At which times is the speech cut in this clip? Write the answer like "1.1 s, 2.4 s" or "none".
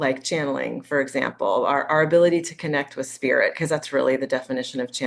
none